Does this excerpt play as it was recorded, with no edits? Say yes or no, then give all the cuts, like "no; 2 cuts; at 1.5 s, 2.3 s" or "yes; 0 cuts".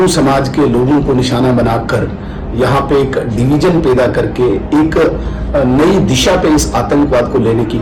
yes; 0 cuts